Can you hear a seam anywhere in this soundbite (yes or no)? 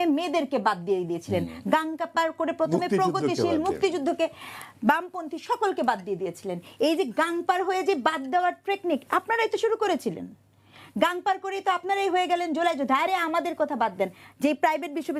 no